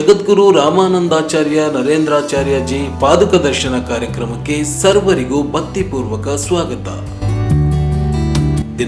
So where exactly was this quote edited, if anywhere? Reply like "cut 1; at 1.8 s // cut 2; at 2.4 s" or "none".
none